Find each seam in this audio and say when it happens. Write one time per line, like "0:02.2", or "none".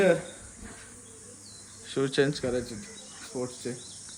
none

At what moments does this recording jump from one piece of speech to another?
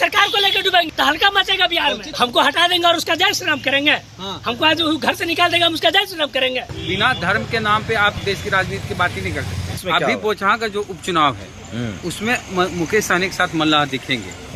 0:00.9
0:02.1
0:06.7
0:08.2
0:09.8

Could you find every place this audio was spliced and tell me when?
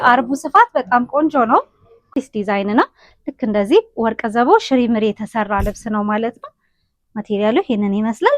0:02.1

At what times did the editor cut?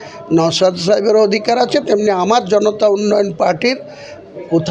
none

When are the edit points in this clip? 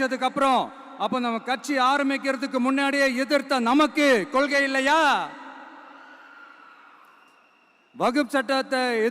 none

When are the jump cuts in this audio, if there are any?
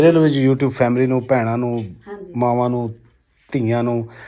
none

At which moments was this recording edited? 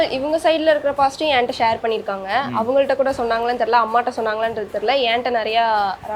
none

